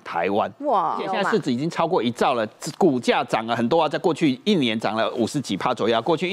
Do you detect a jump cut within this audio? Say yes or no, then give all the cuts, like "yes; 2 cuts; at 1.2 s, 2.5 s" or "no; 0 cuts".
yes; 1 cut; at 1.1 s